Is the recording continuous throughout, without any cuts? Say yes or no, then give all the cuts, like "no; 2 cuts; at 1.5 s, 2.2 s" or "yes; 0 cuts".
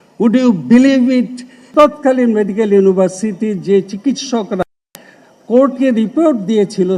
no; 1 cut; at 1.7 s